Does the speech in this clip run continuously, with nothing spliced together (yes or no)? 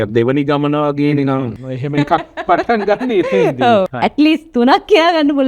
no